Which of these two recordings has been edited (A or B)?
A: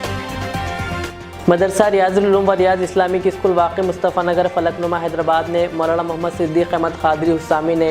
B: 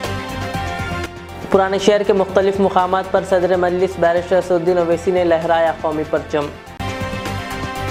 A